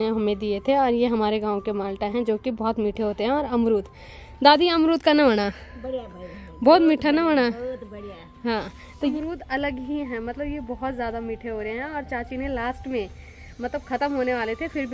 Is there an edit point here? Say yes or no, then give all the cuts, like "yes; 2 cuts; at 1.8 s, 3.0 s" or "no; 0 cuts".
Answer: no; 0 cuts